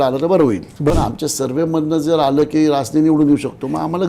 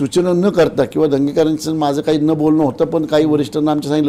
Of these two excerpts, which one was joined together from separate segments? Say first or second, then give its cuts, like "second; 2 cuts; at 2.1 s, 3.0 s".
first; 1 cut; at 0.9 s